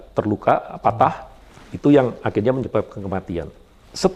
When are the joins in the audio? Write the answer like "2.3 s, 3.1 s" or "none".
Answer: none